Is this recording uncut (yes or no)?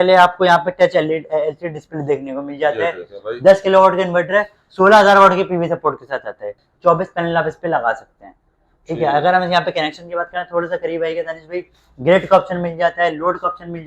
no